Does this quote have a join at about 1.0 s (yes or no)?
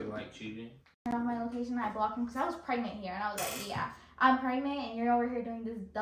yes